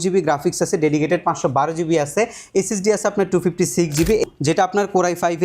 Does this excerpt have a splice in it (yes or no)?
yes